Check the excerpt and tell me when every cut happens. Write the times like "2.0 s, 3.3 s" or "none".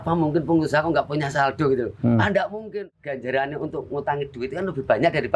2.7 s